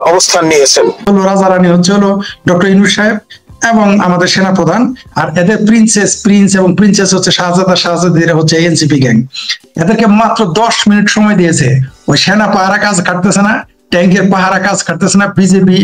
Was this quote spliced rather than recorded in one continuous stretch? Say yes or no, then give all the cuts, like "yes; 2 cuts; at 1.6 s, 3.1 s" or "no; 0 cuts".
yes; 1 cut; at 1.0 s